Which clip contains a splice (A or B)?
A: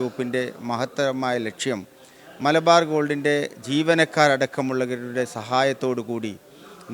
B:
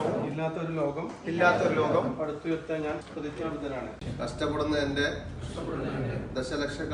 B